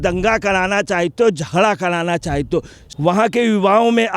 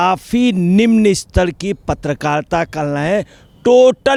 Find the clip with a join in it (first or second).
first